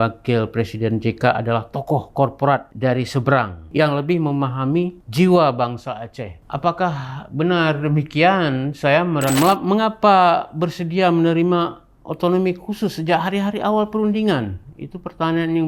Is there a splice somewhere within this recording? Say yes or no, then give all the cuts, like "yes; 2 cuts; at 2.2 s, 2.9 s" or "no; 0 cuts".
yes; 2 cuts; at 3.7 s, 9.3 s